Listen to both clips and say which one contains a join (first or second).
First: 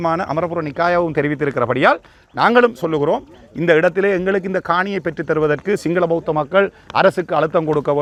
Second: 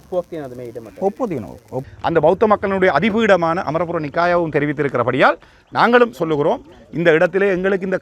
second